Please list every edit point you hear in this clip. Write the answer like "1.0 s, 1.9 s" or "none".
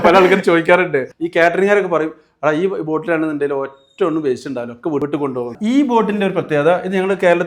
1.1 s, 5.4 s